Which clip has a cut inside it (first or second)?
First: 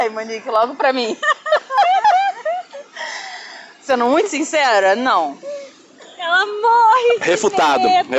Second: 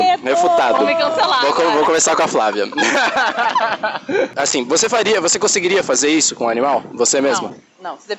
second